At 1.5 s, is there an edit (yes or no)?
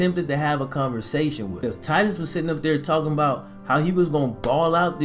yes